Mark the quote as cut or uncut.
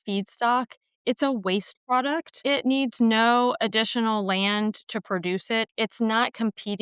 cut